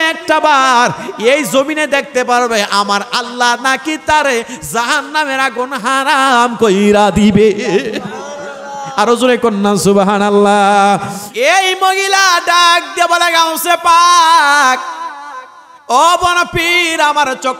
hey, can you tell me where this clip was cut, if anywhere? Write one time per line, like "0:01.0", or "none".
0:11.2

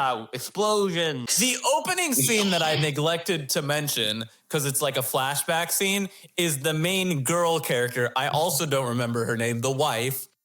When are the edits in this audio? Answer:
0:01.3

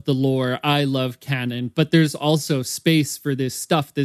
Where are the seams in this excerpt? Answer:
none

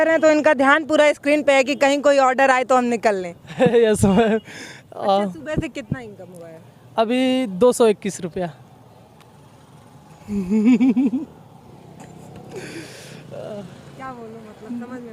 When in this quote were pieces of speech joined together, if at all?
none

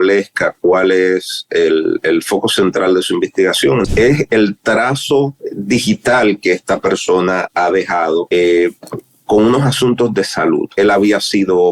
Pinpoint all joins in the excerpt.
0:03.9
0:05.5
0:08.3
0:10.7

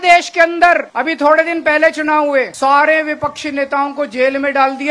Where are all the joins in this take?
0:00.9
0:02.5

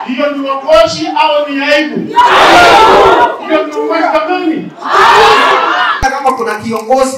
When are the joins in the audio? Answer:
0:05.9

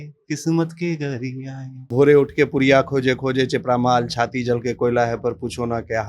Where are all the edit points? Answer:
0:01.9

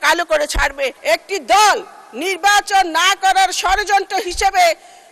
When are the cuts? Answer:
0:01.0

